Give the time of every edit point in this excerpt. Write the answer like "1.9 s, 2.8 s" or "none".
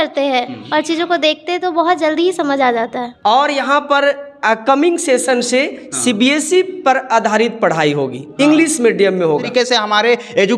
3.0 s, 9.5 s